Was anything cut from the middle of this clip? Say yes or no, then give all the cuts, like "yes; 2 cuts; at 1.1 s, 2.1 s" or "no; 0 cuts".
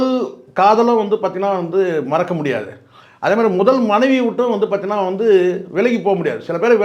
no; 0 cuts